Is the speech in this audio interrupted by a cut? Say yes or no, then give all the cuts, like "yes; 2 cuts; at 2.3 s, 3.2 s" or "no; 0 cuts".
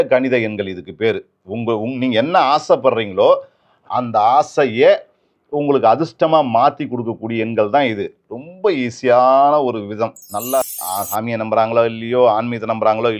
yes; 1 cut; at 10.7 s